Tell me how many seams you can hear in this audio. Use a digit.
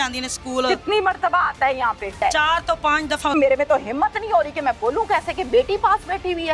2